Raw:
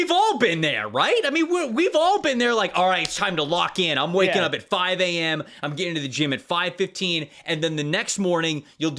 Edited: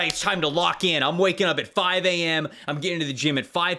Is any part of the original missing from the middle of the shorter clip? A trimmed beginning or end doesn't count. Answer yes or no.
no